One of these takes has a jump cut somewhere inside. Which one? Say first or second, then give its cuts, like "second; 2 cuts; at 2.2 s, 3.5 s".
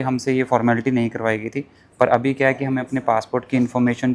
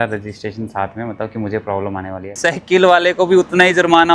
second; 1 cut; at 2.4 s